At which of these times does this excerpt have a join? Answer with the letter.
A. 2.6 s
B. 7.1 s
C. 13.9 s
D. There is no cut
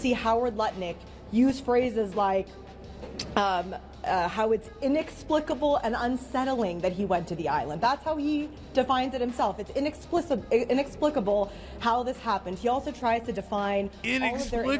D